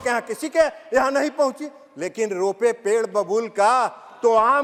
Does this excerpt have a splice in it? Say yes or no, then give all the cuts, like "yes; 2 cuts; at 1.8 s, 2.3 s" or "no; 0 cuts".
no; 0 cuts